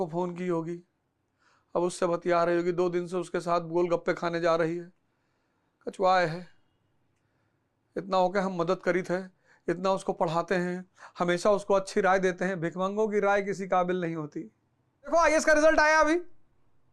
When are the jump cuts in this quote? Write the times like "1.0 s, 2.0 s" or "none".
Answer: 15.1 s